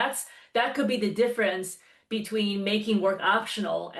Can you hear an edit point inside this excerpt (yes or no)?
no